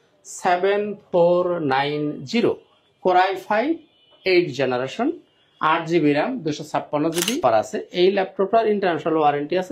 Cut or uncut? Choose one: cut